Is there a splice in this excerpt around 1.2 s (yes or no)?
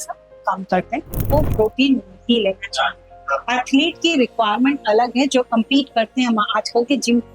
yes